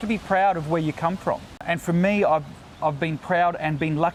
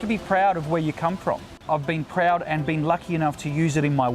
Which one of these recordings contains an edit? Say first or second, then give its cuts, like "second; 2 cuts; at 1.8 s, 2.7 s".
second; 1 cut; at 1.5 s